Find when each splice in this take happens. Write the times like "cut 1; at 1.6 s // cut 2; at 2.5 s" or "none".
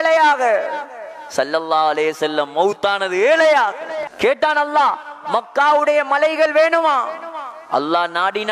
cut 1; at 4.1 s